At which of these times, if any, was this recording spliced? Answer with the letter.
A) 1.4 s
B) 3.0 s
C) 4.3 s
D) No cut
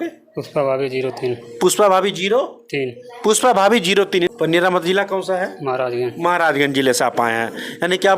C